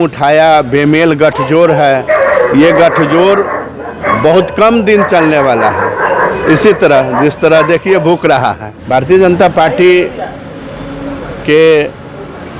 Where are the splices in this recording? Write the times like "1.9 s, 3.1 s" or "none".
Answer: 8.7 s